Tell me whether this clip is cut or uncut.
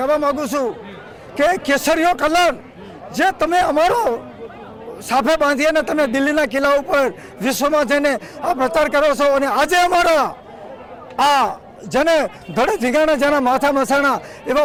uncut